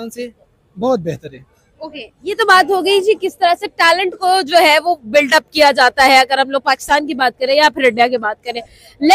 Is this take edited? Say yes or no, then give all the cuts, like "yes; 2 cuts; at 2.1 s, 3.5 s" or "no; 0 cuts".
no; 0 cuts